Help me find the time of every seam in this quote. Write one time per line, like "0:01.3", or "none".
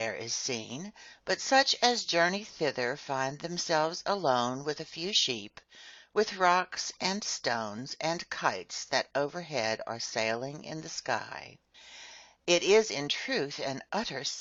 none

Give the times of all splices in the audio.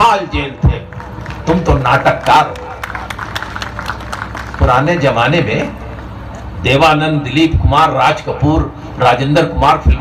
0:01.3

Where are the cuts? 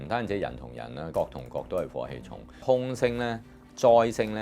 0:01.1
0:02.6

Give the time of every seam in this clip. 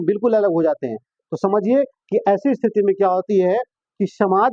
none

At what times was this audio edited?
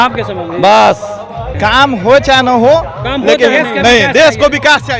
0:01.4

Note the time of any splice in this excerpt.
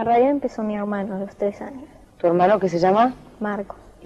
0:01.7

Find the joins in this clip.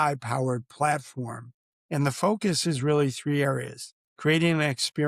0:01.7

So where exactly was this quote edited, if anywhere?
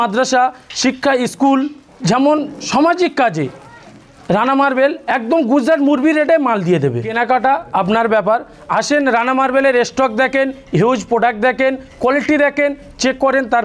0:01.9
0:02.6
0:07.0

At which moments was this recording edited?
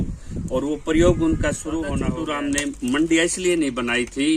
0:02.1

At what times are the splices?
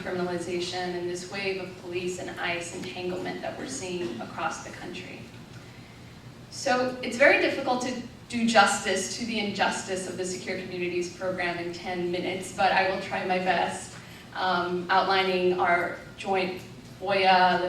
0:12.7

